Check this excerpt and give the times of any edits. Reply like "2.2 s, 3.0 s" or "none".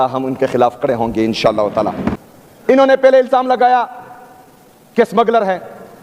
2.2 s